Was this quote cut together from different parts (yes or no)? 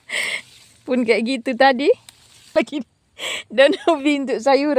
yes